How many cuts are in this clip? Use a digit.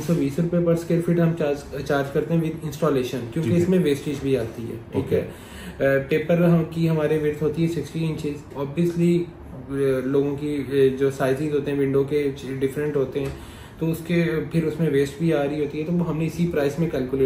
0